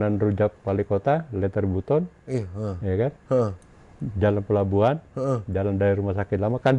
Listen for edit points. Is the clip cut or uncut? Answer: uncut